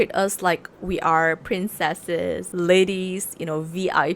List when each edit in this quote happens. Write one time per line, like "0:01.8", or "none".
0:02.5